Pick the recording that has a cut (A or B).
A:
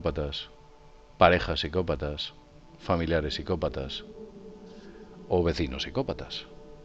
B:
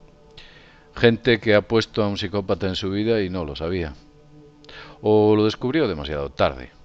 A